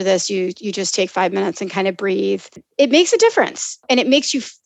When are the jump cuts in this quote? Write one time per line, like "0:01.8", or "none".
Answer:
0:02.7
0:03.8